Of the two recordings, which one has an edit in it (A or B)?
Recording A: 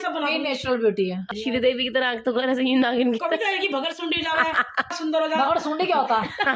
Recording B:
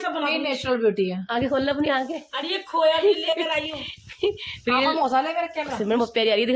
A